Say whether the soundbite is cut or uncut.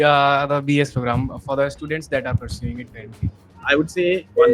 cut